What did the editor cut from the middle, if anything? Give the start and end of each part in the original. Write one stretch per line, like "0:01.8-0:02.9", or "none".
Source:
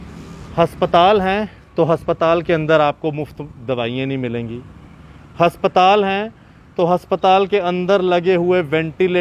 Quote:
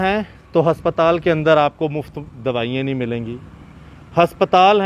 none